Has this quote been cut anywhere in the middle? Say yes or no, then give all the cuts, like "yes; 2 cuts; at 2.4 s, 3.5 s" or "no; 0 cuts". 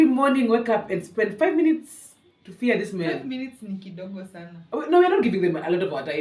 no; 0 cuts